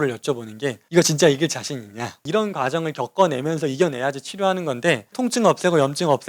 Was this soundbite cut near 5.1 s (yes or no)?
yes